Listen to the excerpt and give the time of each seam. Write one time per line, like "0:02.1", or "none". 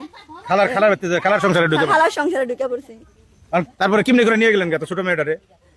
0:03.6